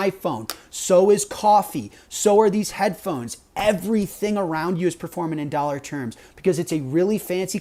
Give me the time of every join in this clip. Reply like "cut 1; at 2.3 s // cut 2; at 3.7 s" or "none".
none